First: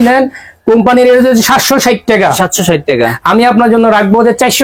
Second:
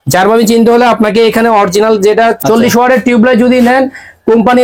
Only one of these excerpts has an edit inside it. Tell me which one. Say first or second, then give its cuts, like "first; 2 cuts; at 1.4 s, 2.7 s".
second; 1 cut; at 2.4 s